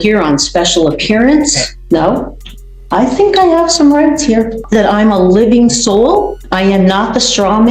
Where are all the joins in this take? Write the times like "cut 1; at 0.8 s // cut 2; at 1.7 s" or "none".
cut 1; at 1.7 s // cut 2; at 4.6 s // cut 3; at 6.4 s